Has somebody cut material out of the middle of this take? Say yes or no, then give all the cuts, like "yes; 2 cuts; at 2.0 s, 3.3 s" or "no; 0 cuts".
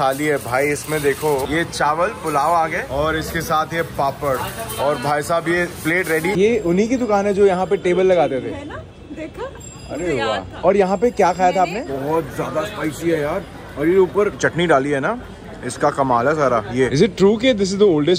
yes; 4 cuts; at 1.5 s, 6.4 s, 11.9 s, 16.9 s